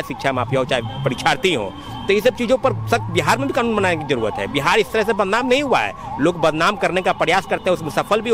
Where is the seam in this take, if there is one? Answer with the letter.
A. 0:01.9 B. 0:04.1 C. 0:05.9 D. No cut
D